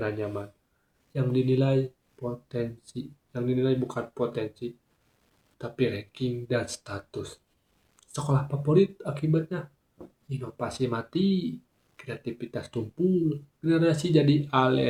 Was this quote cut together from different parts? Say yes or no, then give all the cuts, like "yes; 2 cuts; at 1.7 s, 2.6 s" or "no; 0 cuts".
no; 0 cuts